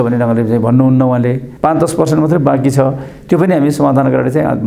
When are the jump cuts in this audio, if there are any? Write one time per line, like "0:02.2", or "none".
0:01.5